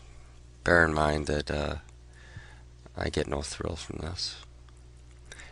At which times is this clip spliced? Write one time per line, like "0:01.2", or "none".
none